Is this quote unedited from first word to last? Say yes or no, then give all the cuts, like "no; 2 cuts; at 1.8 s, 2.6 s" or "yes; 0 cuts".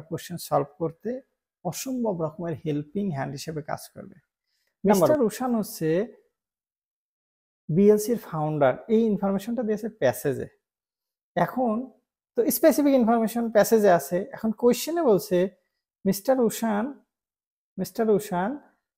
no; 1 cut; at 5.1 s